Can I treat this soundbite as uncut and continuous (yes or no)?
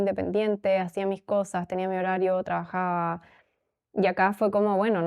yes